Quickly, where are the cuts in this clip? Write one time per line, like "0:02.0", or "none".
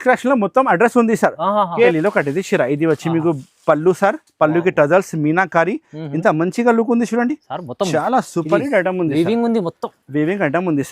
0:01.9